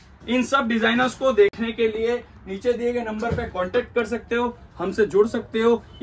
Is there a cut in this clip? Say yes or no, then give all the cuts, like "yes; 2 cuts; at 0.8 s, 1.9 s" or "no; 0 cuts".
no; 0 cuts